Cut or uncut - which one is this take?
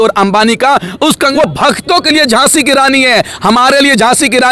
cut